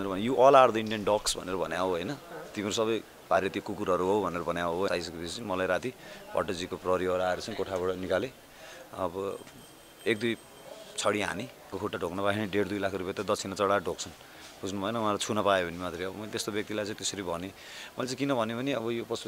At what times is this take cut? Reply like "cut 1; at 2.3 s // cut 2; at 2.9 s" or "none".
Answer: cut 1; at 4.9 s // cut 2; at 11.8 s